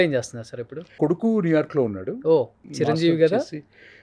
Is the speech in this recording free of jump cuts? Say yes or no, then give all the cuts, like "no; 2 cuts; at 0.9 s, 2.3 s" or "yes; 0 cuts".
no; 2 cuts; at 0.9 s, 2.6 s